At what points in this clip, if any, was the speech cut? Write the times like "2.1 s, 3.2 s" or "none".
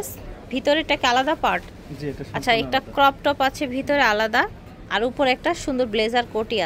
none